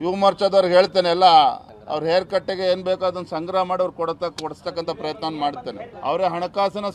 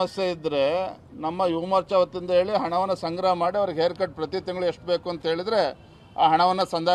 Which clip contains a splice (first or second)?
first